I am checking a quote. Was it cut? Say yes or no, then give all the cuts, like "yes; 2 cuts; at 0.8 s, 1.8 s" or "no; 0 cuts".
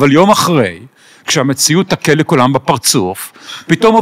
no; 0 cuts